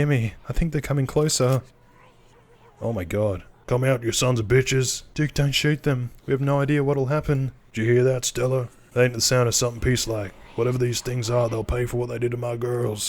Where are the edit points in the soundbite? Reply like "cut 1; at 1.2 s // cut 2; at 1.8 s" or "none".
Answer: cut 1; at 3.5 s // cut 2; at 5.0 s // cut 3; at 7.6 s // cut 4; at 8.8 s